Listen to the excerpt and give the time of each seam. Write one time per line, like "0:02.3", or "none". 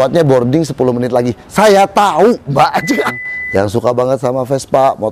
0:03.2